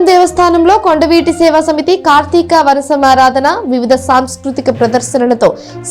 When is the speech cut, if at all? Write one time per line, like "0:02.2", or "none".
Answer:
none